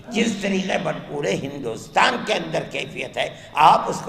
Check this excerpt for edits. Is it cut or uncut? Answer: uncut